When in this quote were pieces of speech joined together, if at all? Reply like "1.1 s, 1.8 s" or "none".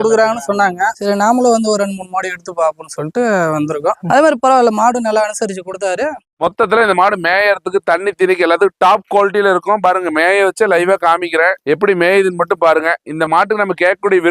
1.0 s, 4.0 s, 6.3 s